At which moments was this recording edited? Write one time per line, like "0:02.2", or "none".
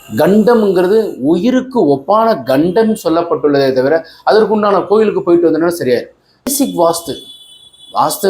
0:06.5